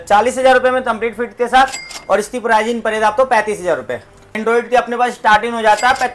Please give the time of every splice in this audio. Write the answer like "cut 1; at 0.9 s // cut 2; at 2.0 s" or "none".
cut 1; at 4.3 s